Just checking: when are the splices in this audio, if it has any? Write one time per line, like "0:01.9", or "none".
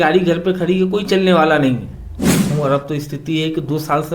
0:02.5